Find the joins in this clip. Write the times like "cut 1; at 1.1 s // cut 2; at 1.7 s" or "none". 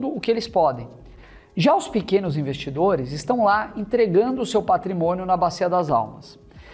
none